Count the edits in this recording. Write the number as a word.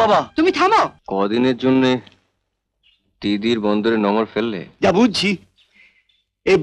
two